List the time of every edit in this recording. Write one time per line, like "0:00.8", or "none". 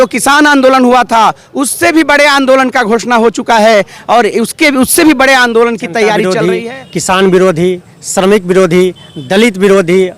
0:06.3